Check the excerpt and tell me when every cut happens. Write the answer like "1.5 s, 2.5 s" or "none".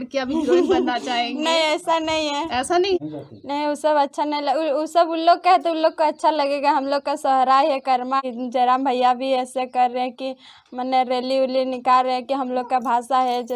3.0 s, 8.2 s